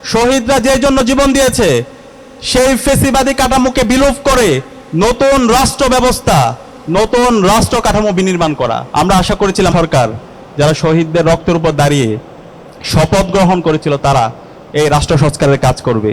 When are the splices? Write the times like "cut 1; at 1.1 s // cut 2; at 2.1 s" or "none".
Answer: cut 1; at 8.8 s // cut 2; at 9.7 s